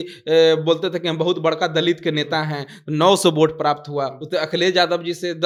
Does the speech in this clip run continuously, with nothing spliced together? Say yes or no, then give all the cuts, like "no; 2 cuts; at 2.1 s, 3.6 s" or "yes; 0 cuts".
yes; 0 cuts